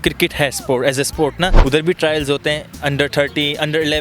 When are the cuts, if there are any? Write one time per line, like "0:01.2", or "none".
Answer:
0:01.6